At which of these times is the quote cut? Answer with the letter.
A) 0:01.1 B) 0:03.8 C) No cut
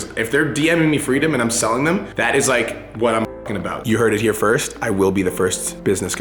B